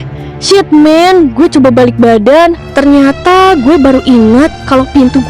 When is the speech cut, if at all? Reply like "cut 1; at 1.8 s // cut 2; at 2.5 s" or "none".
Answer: cut 1; at 2.6 s